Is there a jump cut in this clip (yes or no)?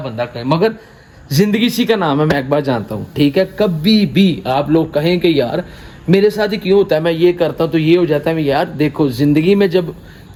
no